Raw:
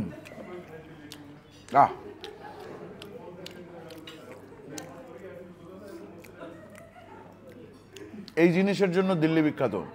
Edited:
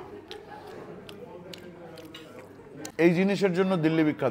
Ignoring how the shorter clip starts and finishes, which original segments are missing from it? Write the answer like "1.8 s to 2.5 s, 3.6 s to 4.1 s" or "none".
4.9 s to 8.3 s